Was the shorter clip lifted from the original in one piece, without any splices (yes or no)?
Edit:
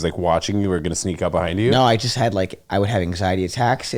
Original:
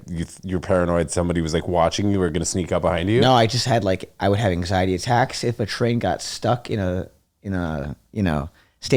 yes